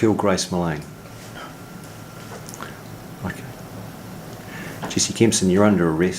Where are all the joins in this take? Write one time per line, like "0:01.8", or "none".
none